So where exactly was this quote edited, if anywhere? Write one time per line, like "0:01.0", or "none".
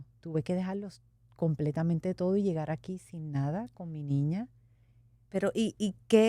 none